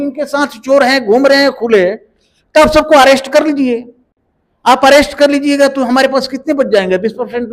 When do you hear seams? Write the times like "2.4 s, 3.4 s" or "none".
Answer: none